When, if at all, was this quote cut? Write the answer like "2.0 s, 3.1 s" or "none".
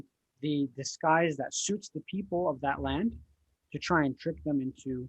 none